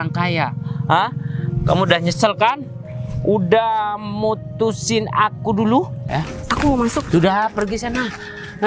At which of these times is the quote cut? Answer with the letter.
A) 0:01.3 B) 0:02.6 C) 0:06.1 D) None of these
C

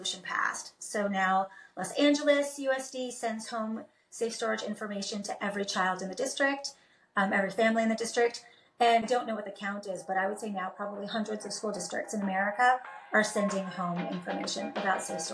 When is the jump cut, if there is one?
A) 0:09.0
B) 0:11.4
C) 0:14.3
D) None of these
A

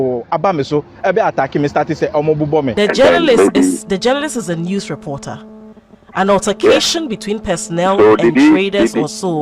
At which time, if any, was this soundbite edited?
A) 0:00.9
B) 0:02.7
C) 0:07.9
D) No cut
B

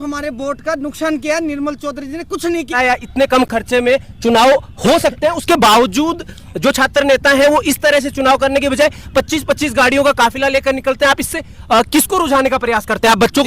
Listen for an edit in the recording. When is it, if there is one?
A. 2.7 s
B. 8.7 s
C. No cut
A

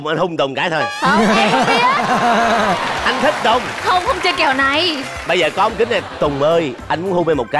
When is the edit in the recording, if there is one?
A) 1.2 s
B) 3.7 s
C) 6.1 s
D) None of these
D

